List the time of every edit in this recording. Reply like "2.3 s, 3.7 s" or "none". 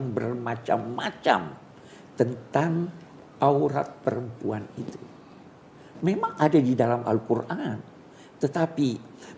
none